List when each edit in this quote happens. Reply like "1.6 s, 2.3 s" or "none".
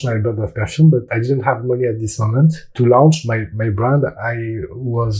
1.1 s, 2.7 s